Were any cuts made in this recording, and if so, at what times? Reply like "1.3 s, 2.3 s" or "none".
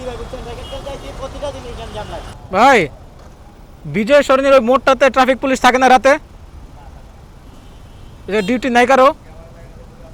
2.3 s